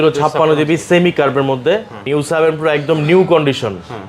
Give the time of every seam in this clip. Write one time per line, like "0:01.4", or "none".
0:02.0